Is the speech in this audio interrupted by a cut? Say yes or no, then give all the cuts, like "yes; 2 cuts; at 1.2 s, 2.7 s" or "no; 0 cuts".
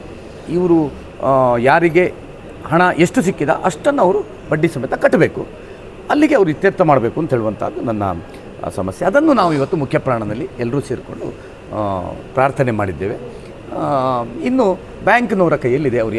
no; 0 cuts